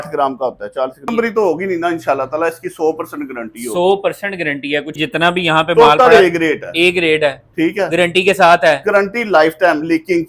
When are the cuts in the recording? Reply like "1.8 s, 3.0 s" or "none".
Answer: 1.1 s, 5.0 s